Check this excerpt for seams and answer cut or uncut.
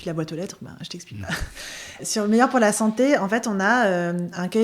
cut